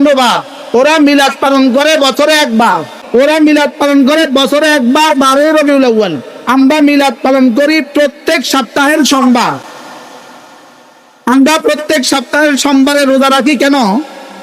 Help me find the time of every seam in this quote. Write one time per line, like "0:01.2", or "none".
0:02.9